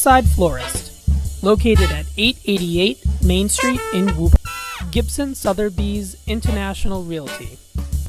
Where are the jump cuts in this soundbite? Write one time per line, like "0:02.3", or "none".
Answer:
0:04.3